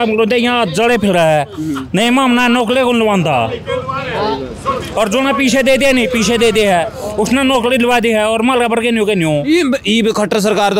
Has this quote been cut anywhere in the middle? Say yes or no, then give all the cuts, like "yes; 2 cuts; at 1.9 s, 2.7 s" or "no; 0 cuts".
no; 0 cuts